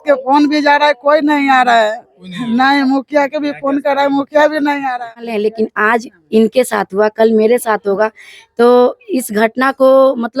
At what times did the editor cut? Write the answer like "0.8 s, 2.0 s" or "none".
5.4 s